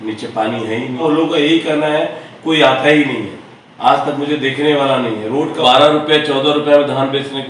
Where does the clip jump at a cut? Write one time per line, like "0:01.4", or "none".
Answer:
0:01.0
0:05.6

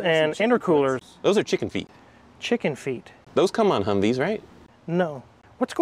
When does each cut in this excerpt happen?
none

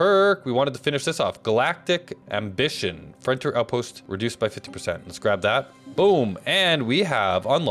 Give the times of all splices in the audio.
0:02.2
0:04.0

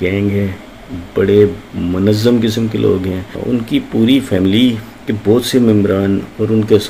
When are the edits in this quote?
0:03.4

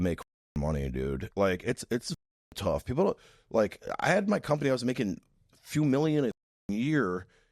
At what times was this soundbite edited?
0:01.2

